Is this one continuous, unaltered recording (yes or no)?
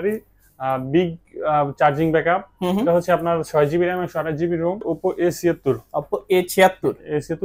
no